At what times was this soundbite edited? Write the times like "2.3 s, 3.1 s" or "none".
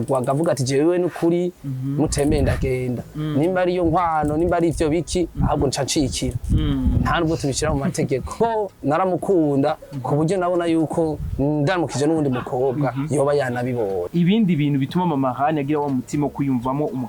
8.4 s, 14.1 s